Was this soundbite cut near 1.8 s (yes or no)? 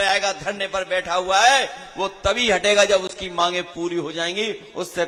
no